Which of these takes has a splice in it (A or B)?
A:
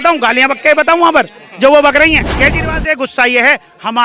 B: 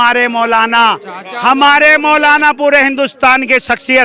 A